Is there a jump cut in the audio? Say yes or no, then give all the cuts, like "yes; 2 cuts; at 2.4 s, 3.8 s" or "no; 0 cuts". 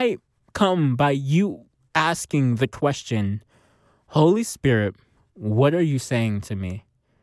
no; 0 cuts